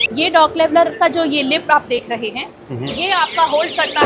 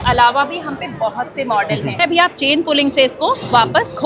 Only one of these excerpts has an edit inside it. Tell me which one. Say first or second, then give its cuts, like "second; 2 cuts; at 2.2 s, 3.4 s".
second; 1 cut; at 2.0 s